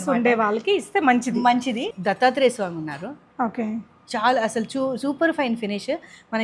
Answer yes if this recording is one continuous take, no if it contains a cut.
no